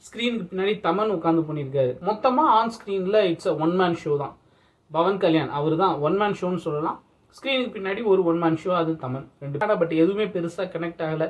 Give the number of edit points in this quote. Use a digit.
2